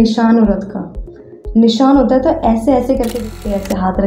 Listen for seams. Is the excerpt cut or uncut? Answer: cut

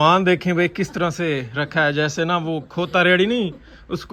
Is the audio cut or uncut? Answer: uncut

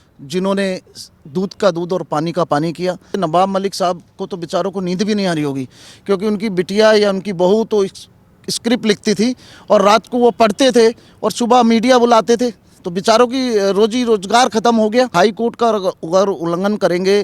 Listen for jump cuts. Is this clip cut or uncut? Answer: cut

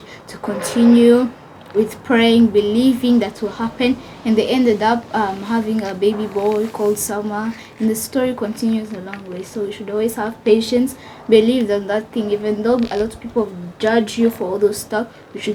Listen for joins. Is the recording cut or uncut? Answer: uncut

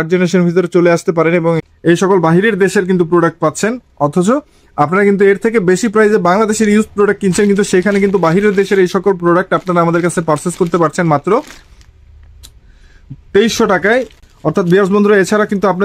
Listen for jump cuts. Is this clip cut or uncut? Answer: cut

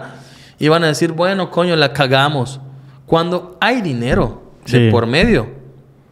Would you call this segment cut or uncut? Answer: uncut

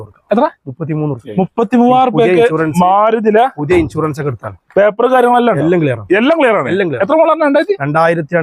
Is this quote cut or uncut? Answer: uncut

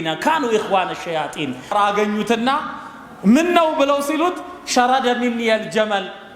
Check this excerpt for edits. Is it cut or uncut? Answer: cut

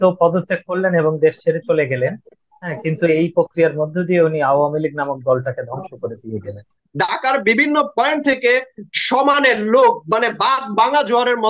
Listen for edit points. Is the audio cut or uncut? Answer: cut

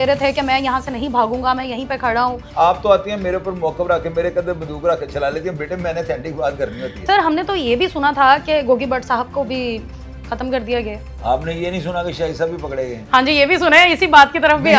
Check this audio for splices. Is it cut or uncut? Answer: cut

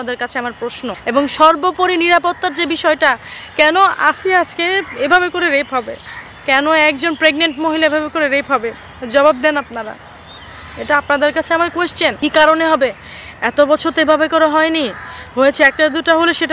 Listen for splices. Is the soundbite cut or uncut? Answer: cut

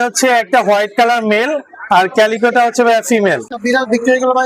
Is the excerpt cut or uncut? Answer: cut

